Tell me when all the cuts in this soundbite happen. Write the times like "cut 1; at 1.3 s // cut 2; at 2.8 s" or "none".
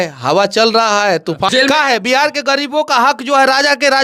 cut 1; at 1.5 s